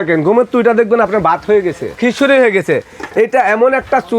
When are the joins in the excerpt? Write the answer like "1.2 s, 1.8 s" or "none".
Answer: 1.9 s